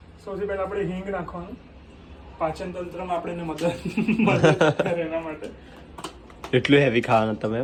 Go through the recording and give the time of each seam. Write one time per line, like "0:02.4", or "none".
none